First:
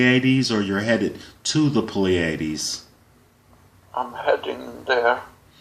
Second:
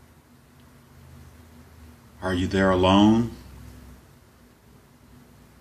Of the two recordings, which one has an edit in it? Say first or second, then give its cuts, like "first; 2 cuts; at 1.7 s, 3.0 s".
first; 1 cut; at 1.0 s